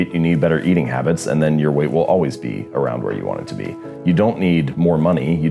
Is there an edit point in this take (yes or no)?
no